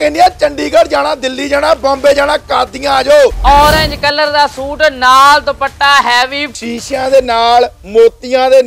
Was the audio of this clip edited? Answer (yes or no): yes